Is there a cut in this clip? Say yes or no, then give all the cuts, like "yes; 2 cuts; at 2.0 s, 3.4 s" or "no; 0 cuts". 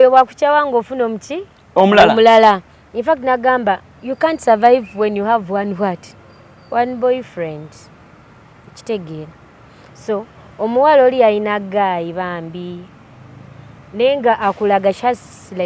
no; 0 cuts